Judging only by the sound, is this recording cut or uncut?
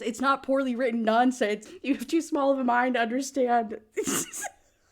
cut